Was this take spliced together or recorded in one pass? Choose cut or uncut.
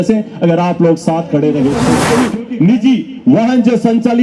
cut